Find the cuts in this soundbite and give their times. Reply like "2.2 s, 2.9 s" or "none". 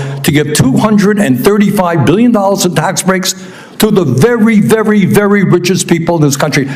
none